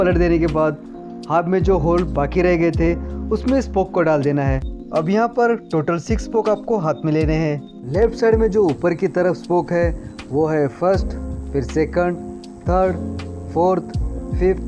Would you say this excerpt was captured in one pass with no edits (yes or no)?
no